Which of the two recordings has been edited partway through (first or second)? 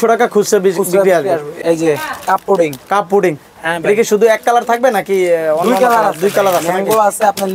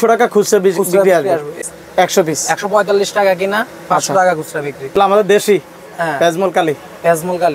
second